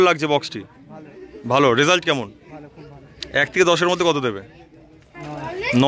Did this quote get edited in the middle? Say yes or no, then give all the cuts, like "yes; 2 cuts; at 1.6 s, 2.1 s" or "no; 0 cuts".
no; 0 cuts